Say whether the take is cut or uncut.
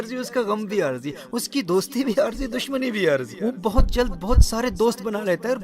cut